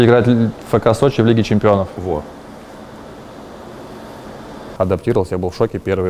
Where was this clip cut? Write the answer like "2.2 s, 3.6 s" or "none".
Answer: 4.6 s